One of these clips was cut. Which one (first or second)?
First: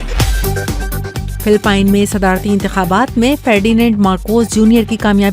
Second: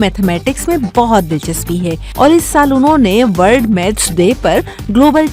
first